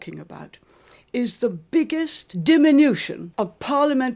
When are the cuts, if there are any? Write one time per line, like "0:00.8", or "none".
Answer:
0:02.2
0:03.2